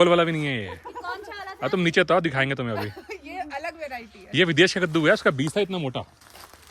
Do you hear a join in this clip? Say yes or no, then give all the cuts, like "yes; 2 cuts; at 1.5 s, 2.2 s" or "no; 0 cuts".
no; 0 cuts